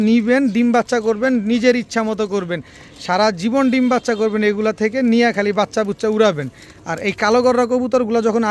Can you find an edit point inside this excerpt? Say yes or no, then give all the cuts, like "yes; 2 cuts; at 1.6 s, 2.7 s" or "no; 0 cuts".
no; 0 cuts